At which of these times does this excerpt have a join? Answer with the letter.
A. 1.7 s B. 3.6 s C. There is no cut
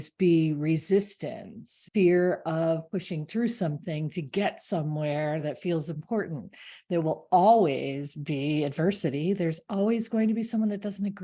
A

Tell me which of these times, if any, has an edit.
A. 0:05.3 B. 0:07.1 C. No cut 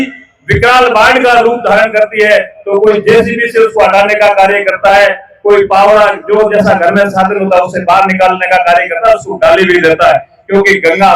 B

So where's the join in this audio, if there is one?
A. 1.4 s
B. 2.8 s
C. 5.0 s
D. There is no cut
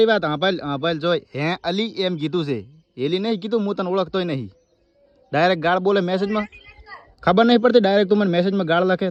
D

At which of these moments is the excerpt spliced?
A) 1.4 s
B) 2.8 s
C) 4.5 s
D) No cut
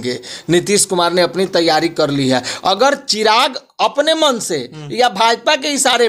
D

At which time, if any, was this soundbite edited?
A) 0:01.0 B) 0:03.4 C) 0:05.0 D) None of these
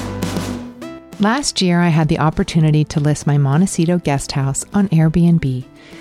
A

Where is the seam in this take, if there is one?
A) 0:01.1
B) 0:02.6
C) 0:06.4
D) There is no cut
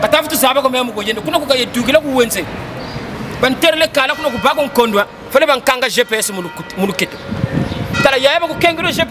D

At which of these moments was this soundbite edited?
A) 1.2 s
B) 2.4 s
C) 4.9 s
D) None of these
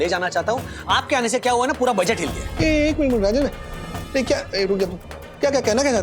B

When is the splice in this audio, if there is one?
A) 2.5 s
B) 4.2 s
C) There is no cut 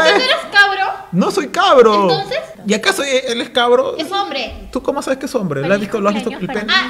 A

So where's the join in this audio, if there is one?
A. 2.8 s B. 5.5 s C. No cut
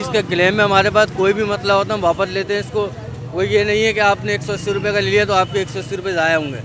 C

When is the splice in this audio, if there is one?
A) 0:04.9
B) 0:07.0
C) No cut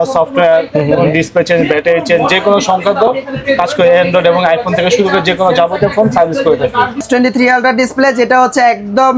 B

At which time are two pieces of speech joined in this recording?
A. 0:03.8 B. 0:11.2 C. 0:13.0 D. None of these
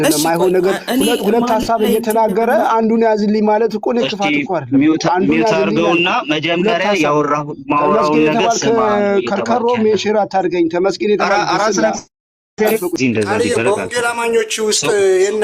C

